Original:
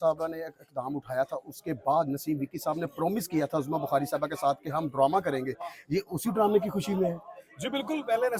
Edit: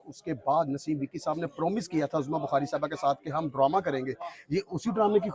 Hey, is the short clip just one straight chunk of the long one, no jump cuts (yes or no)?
yes